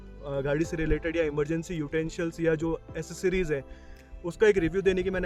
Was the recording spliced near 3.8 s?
no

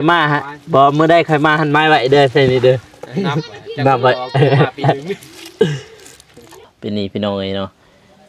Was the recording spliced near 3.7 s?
no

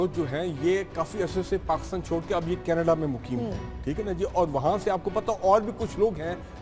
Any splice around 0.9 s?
no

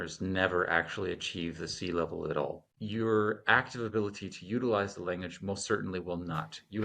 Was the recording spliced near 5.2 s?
no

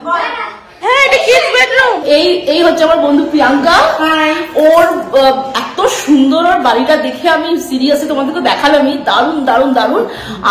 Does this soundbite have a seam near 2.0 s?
yes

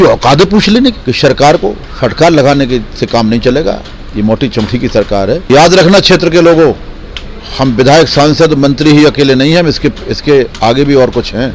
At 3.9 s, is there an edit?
no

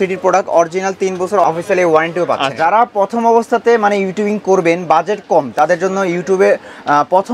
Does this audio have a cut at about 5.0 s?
no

